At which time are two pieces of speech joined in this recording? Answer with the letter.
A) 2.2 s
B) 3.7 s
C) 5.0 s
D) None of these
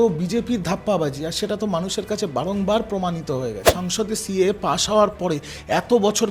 B